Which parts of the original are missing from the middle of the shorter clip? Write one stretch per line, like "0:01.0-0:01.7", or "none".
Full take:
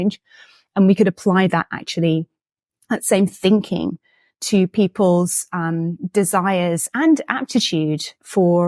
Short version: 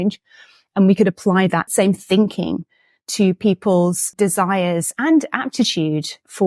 0:01.7-0:03.0
0:05.4-0:06.0